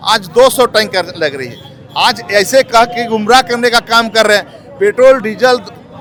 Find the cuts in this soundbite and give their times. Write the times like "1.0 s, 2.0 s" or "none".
none